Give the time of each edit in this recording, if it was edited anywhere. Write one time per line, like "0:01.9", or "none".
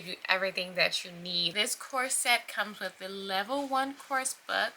0:01.4